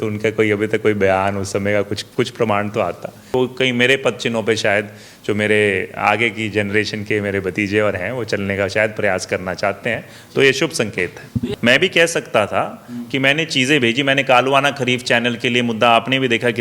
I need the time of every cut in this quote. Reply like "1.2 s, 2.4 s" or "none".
3.3 s, 11.5 s

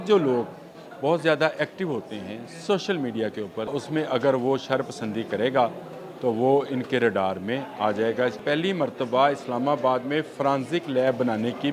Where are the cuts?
3.7 s, 8.4 s

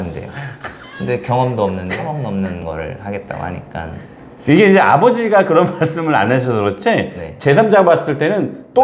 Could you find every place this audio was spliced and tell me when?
2.6 s

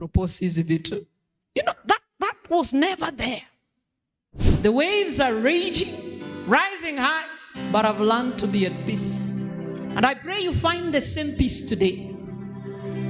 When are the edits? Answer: 4.4 s

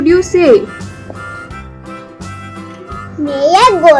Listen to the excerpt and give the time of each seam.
1.1 s, 2.6 s

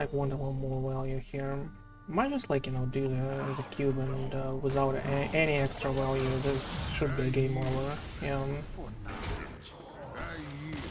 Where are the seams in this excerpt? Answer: 9.3 s

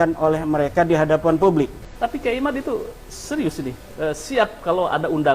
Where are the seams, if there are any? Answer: 1.8 s

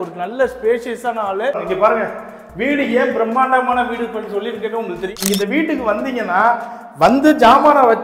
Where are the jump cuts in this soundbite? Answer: 1.6 s, 5.2 s

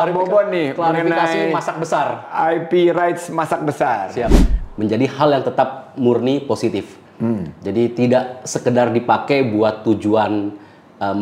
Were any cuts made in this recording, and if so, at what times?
4.5 s, 7.0 s

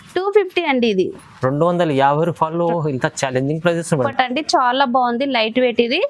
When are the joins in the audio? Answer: 4.1 s

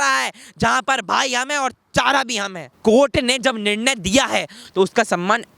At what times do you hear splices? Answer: 2.7 s, 4.6 s

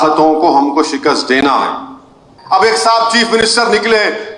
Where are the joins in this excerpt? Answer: 2.3 s

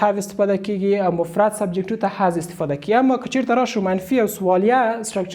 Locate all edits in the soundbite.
none

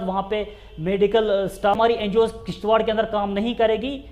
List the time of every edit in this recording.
1.8 s

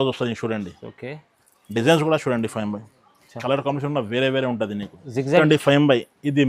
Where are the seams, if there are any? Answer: 5.4 s

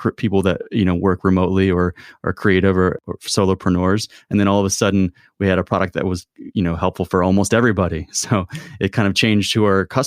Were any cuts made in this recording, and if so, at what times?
3.0 s

